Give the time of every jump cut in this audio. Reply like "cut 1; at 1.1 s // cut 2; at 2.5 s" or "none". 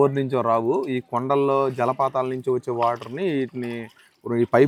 none